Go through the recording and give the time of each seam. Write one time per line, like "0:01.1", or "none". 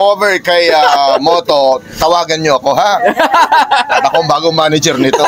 none